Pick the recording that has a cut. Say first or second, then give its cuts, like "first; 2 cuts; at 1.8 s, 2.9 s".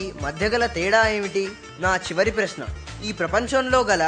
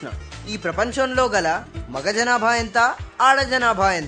first; 1 cut; at 1.6 s